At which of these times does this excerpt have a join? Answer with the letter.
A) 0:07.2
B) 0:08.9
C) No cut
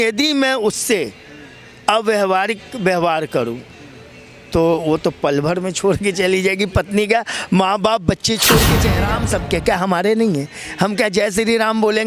B